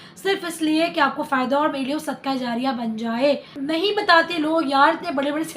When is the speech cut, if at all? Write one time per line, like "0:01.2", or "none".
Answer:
0:03.5

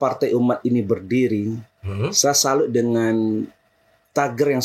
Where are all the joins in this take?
none

